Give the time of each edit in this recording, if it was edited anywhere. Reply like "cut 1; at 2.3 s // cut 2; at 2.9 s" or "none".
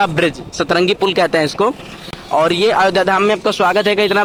none